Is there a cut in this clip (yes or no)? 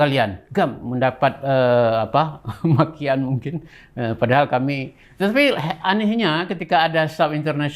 no